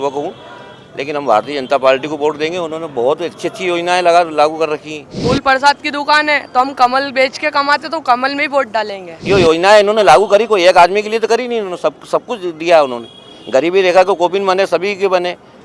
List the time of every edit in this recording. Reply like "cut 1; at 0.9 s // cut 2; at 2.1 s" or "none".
cut 1; at 5.2 s // cut 2; at 9.2 s